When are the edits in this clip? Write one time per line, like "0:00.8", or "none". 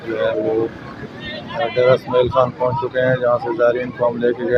none